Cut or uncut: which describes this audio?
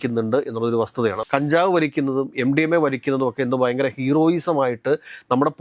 cut